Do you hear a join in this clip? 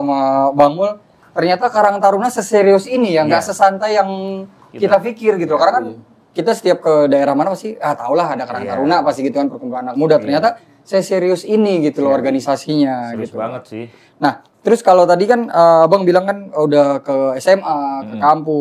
no; 0 cuts

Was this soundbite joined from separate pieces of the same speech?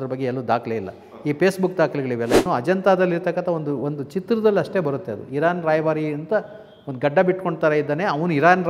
yes; 1 cut; at 2.5 s

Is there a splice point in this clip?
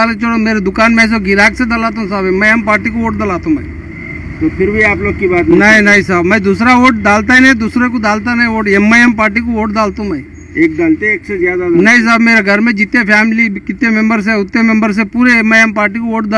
no; 0 cuts

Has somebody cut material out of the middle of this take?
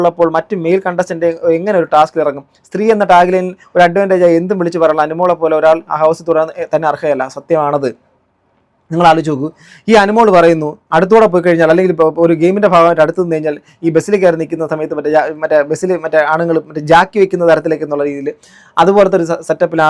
no; 0 cuts

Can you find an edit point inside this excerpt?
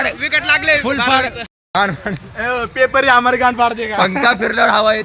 yes; 1 cut; at 1.6 s

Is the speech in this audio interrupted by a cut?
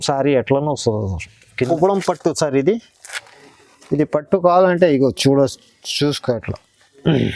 yes; 1 cut; at 1.7 s

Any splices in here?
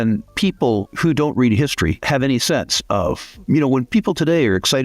yes; 4 cuts; at 0.9 s, 2.0 s, 3.3 s, 3.9 s

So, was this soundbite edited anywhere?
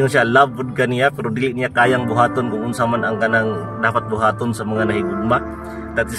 no; 0 cuts

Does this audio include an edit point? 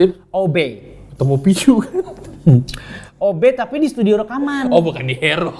no; 0 cuts

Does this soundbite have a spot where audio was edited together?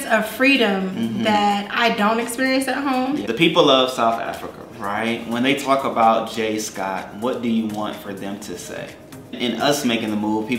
yes; 2 cuts; at 3.2 s, 9.4 s

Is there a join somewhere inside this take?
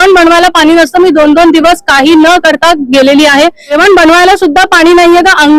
yes; 1 cut; at 3.7 s

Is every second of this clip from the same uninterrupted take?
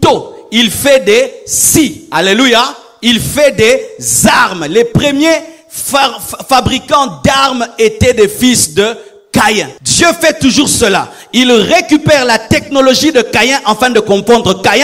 no; 1 cut; at 9.8 s

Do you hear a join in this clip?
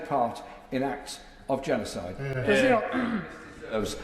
no; 0 cuts

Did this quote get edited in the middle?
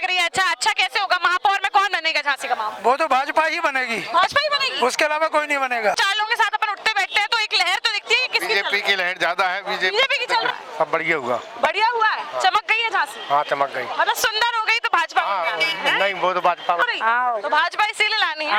yes; 3 cuts; at 5.9 s, 10.5 s, 16.8 s

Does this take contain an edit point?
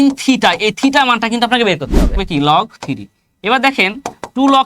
yes; 1 cut; at 2.1 s

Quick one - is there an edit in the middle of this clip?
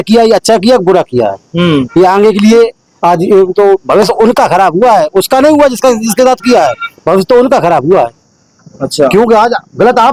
no; 0 cuts

